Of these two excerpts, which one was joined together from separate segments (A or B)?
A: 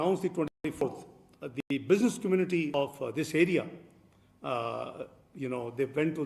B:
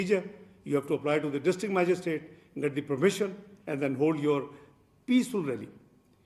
A